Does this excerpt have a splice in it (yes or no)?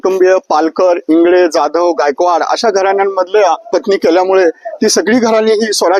no